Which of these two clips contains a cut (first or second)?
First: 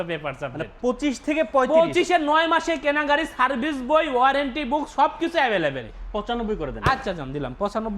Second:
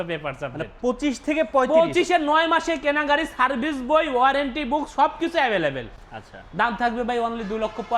first